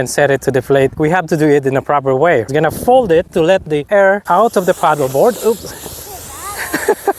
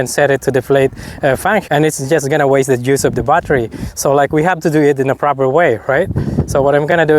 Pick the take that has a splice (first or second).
first